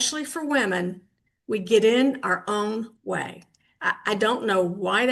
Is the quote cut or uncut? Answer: uncut